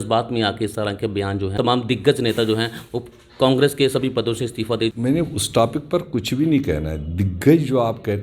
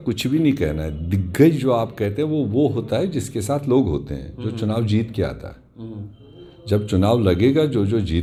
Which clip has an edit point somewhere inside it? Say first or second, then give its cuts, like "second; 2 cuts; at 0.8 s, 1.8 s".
first; 2 cuts; at 1.5 s, 4.9 s